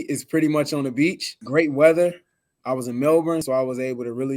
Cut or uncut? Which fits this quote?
cut